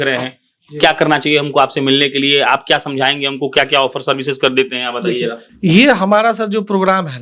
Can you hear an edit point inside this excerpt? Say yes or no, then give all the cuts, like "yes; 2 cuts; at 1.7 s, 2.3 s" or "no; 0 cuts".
no; 0 cuts